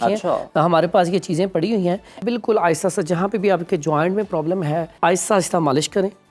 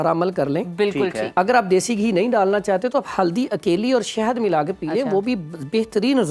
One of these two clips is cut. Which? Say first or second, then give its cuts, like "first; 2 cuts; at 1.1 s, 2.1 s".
first; 2 cuts; at 2.2 s, 4.9 s